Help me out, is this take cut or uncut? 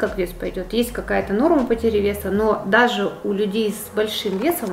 uncut